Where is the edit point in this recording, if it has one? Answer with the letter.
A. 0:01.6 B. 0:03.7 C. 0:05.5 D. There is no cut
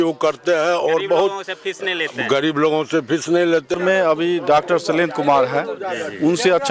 B